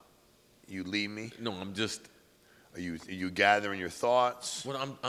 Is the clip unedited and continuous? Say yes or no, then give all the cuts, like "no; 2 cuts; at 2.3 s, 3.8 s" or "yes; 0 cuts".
yes; 0 cuts